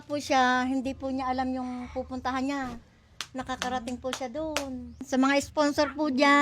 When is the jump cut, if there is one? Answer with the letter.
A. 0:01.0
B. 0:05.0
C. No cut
B